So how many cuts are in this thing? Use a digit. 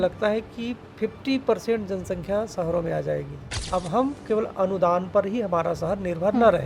1